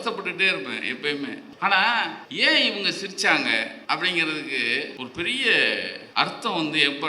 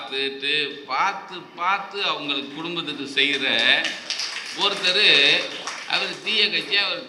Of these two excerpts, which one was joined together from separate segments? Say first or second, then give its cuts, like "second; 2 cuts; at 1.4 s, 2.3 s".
first; 5 cuts; at 1.5 s, 2.2 s, 3.8 s, 4.9 s, 6.0 s